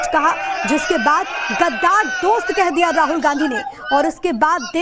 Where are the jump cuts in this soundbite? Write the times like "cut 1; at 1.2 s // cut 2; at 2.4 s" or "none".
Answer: none

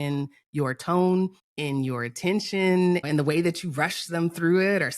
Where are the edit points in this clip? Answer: cut 1; at 1.5 s // cut 2; at 3.0 s

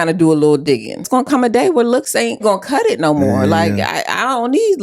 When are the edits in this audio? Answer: cut 1; at 1.1 s // cut 2; at 2.4 s

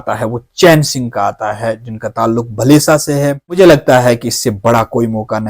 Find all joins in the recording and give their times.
cut 1; at 3.4 s

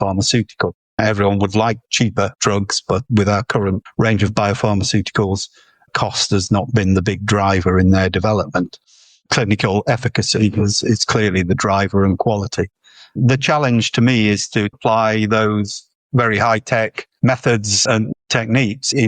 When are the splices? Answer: cut 1; at 0.9 s // cut 2; at 2.3 s // cut 3; at 3.8 s

